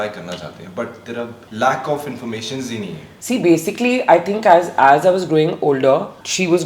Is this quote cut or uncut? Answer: cut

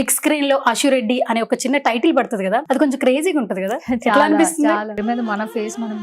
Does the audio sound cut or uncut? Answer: cut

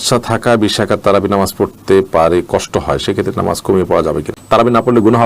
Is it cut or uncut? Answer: cut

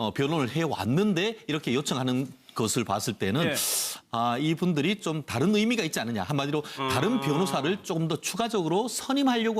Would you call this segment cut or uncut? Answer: cut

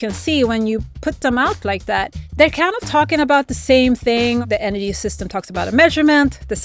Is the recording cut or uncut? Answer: cut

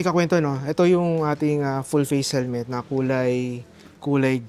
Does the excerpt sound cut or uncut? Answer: uncut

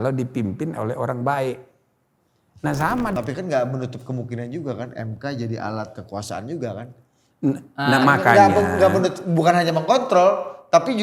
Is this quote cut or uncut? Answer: cut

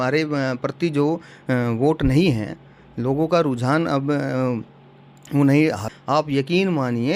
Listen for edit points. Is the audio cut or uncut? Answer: cut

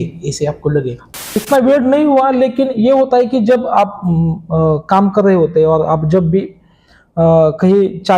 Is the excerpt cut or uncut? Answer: cut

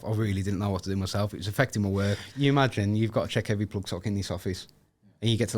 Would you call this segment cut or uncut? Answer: cut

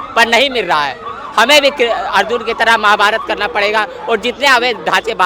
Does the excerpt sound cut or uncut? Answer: uncut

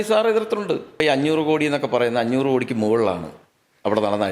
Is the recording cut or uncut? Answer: cut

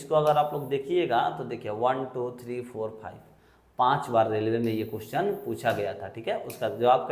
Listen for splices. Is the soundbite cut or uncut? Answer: uncut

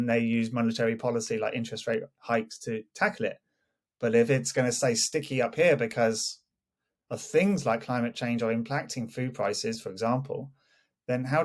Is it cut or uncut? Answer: uncut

